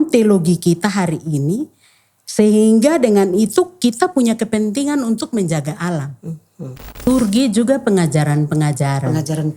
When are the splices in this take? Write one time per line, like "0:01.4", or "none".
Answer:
0:07.0

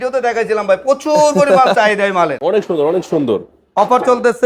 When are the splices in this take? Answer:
0:02.4

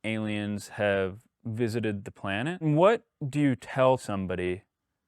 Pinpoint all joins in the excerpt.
0:02.6
0:04.0

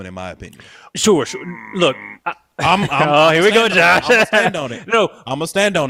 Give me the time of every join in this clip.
none

